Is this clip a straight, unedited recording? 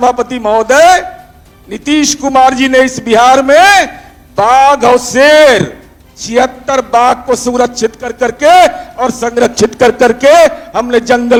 yes; 0 cuts

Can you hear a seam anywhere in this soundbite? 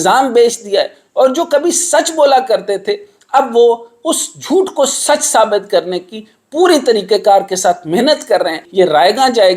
yes; 1 cut; at 8.6 s

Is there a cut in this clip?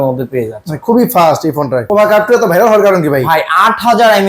yes; 1 cut; at 1.9 s

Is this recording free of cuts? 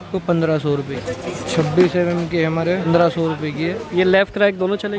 no; 2 cuts; at 0.9 s, 2.9 s

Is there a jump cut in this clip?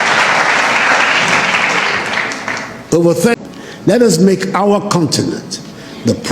yes; 1 cut; at 3.4 s

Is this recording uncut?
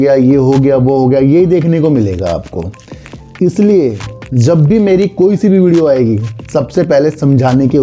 yes; 0 cuts

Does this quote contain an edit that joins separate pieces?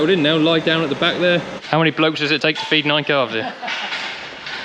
yes; 1 cut; at 1.6 s

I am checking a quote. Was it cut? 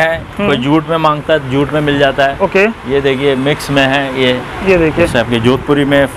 no; 0 cuts

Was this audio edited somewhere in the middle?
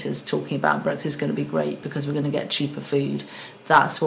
no; 0 cuts

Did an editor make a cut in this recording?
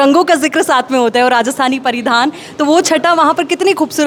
no; 0 cuts

